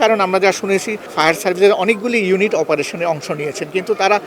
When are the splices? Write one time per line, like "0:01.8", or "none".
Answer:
0:01.0